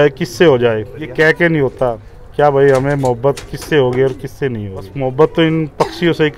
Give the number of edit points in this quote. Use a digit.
2